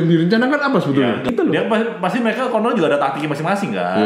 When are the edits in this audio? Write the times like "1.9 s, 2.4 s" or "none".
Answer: 1.3 s